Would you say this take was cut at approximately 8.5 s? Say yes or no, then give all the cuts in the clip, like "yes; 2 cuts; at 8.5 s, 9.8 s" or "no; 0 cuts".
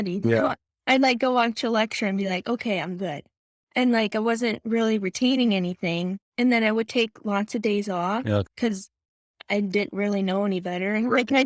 yes; 2 cuts; at 6.2 s, 8.5 s